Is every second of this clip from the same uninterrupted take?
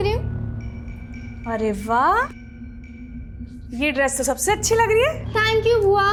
yes; 0 cuts

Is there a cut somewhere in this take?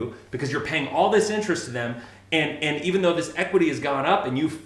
no; 0 cuts

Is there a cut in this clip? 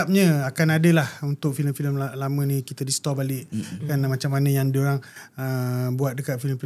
no; 0 cuts

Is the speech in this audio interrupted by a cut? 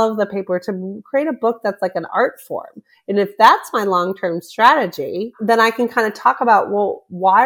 yes; 1 cut; at 5.3 s

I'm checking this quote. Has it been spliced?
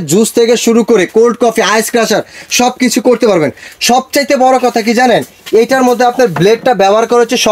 no; 0 cuts

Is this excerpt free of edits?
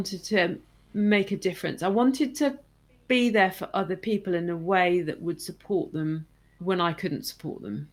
yes; 0 cuts

